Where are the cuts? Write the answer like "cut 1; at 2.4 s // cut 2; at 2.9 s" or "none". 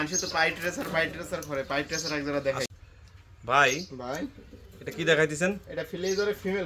cut 1; at 2.7 s